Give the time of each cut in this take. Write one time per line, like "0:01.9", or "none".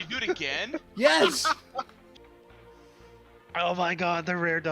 0:02.1